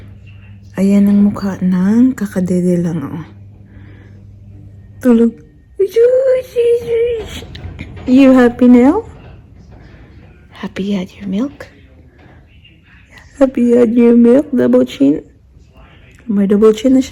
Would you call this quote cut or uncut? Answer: uncut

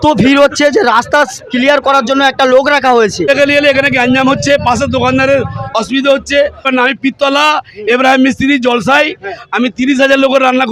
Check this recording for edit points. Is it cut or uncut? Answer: cut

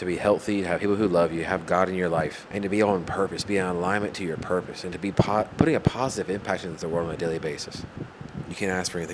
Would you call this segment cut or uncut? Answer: cut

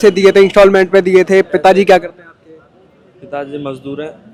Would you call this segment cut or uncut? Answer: uncut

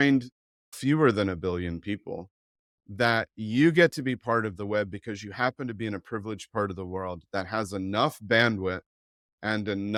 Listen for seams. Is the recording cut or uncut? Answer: uncut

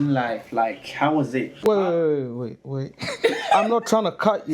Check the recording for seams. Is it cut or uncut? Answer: cut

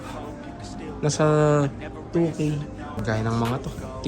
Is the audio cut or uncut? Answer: cut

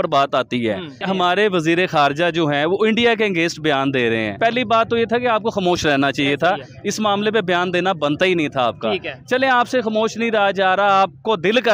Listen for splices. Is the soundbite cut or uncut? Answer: cut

